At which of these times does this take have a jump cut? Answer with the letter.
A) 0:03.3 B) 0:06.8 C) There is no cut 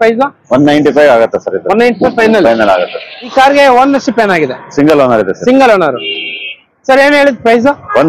A